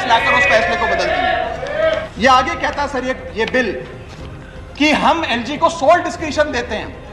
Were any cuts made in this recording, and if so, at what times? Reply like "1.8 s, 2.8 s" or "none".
none

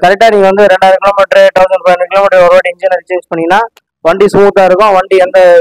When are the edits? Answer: none

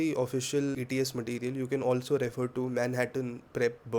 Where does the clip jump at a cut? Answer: none

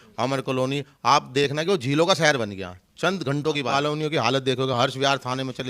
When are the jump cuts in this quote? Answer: 3.7 s

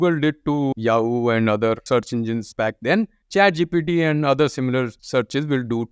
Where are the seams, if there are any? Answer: 0.7 s, 1.8 s, 5.0 s

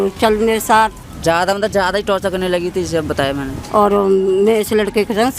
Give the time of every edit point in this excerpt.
1.1 s, 3.5 s

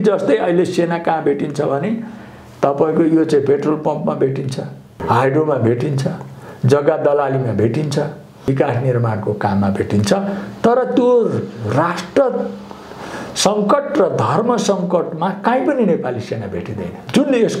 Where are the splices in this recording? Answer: 5.0 s, 8.4 s

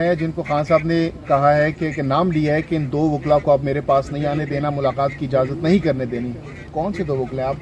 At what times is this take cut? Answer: none

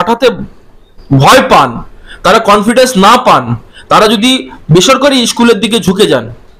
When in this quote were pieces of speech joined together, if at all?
none

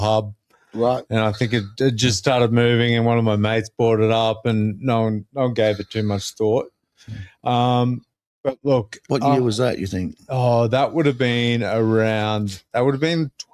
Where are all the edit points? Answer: none

